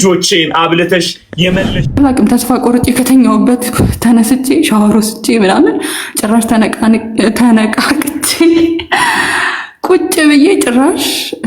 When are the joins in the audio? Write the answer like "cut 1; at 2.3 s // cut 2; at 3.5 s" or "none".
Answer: cut 1; at 1.8 s